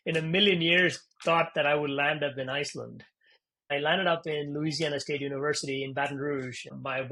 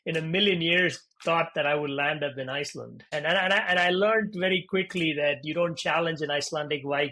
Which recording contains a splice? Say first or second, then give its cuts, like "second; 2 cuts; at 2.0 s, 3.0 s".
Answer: second; 1 cut; at 3.0 s